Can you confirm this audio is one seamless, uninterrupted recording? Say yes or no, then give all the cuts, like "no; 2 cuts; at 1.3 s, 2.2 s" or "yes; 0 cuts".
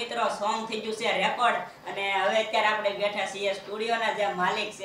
yes; 0 cuts